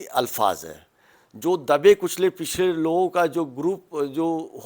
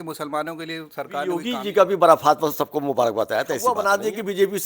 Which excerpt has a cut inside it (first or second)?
second